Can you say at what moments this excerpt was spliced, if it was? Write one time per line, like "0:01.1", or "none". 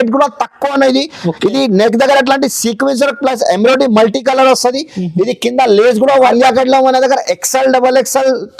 0:06.3